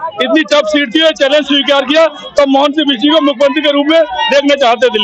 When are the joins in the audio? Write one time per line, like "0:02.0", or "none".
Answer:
none